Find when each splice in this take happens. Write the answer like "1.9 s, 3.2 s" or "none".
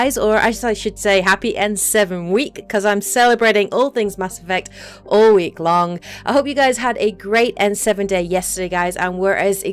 none